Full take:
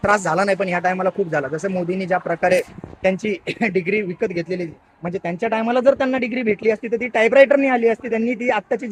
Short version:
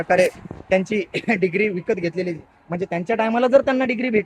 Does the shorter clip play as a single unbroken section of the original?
yes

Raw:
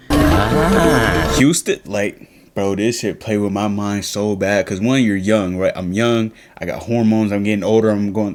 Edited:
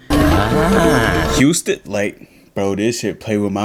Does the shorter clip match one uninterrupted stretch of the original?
yes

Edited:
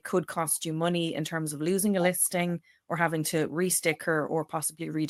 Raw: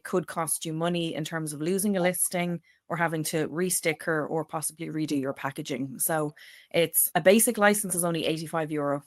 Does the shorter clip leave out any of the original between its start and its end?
no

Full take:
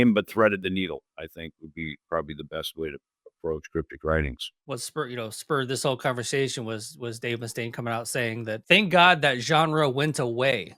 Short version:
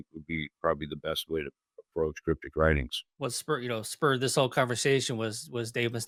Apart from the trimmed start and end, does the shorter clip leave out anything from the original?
no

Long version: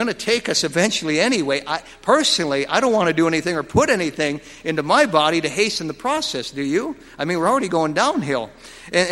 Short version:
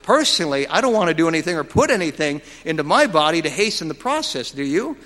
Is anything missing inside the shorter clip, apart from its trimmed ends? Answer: no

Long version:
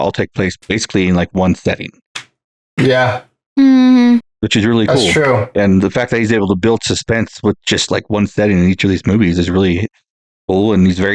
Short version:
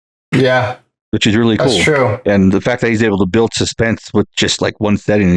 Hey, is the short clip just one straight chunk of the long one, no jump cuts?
no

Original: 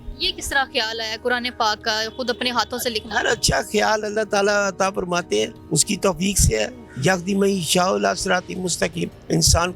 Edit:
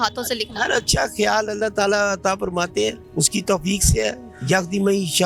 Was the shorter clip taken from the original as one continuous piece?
yes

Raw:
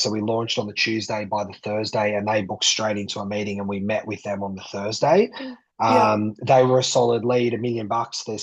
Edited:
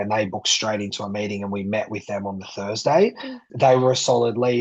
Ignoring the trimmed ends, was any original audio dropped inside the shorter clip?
yes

